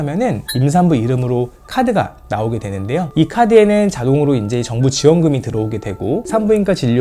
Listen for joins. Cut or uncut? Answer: uncut